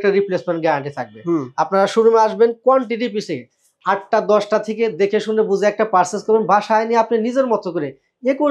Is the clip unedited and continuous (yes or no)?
yes